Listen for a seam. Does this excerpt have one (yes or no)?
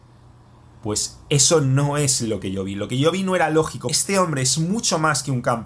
yes